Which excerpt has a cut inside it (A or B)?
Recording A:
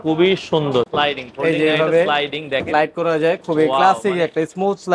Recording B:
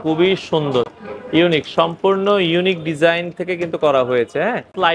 A